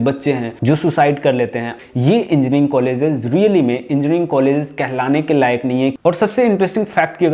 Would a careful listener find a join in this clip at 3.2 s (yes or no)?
no